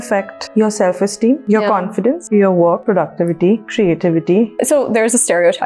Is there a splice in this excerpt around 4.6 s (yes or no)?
yes